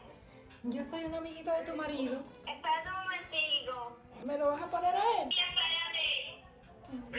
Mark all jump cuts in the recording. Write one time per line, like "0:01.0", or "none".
0:02.4
0:04.1
0:05.3

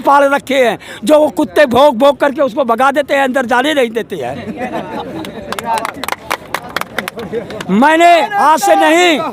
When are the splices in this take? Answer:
none

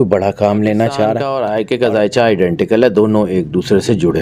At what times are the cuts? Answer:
0:01.3

